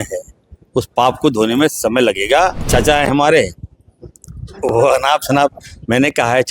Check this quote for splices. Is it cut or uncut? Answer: cut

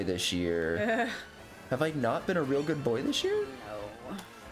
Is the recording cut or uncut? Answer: cut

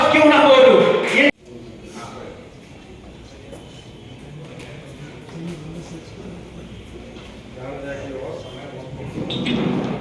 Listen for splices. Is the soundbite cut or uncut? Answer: cut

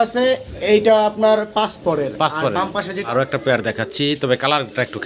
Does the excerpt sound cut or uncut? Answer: cut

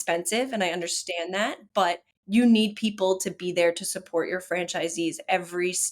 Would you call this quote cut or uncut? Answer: cut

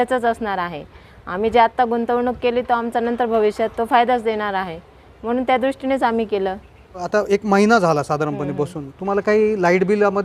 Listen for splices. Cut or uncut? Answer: uncut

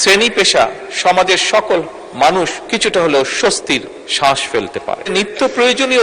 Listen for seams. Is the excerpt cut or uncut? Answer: cut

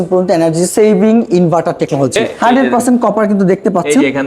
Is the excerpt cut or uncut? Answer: cut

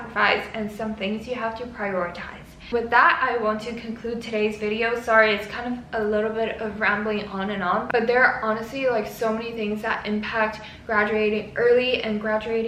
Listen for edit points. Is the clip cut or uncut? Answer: uncut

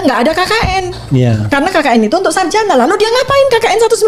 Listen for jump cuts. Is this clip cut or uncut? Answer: uncut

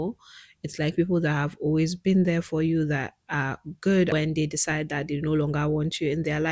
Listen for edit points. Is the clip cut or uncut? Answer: cut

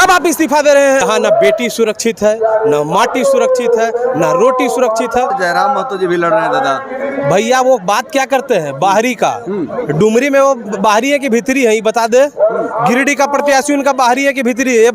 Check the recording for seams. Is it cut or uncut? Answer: cut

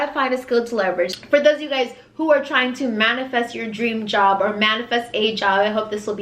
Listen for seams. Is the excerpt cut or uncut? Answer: cut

